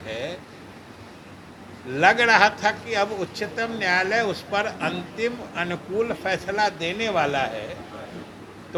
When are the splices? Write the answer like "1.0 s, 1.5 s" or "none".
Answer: none